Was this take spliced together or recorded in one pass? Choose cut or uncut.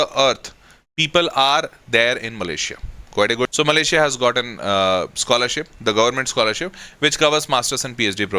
cut